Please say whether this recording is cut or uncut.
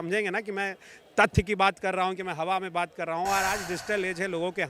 uncut